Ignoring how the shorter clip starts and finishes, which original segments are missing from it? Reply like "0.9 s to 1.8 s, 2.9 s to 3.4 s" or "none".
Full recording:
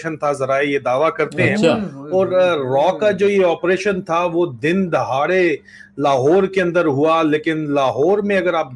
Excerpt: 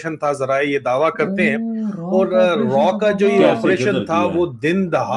none